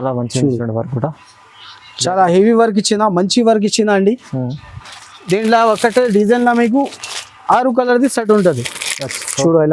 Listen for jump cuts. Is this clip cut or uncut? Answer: uncut